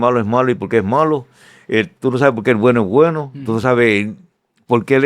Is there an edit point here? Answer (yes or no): no